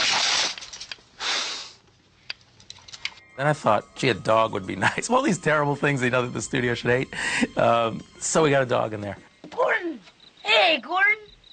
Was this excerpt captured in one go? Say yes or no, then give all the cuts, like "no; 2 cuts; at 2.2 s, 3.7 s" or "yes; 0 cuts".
no; 1 cut; at 10.0 s